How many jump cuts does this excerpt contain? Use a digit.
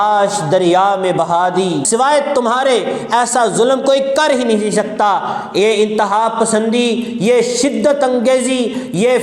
1